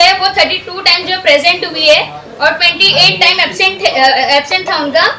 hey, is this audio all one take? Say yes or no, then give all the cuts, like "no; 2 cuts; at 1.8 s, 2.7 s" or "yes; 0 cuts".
yes; 0 cuts